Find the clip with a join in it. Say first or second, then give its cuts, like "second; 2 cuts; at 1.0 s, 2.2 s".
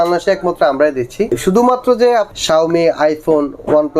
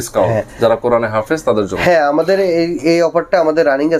first; 2 cuts; at 1.3 s, 2.3 s